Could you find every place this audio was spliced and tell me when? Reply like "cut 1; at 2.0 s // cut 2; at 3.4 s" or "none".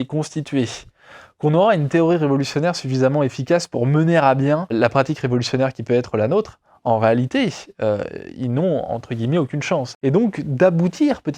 cut 1; at 4.7 s // cut 2; at 9.9 s